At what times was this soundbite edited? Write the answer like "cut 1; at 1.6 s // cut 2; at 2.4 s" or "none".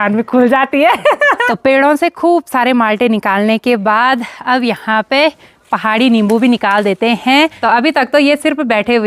cut 1; at 1.5 s // cut 2; at 7.6 s